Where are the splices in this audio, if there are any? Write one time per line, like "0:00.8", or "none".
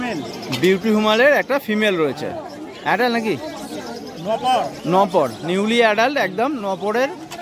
none